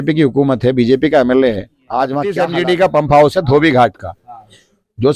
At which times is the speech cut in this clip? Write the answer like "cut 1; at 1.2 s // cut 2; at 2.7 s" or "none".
cut 1; at 2.4 s